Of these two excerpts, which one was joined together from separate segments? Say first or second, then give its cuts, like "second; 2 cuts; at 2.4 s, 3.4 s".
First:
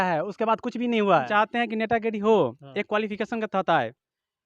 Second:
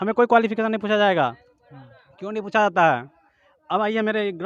first; 1 cut; at 1.3 s